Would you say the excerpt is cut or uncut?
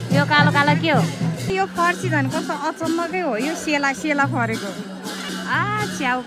cut